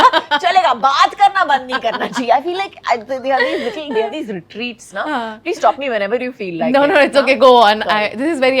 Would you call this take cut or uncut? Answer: uncut